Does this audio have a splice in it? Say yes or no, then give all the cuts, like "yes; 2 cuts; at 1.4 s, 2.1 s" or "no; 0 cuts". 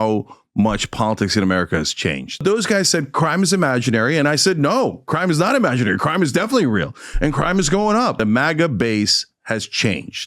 yes; 2 cuts; at 2.4 s, 8.2 s